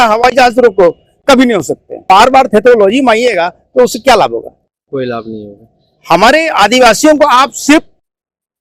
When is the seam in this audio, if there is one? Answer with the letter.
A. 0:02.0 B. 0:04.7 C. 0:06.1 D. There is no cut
A